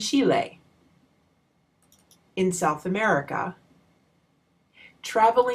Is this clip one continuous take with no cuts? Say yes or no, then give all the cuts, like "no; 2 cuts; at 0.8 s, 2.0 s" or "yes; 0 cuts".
no; 1 cut; at 4.4 s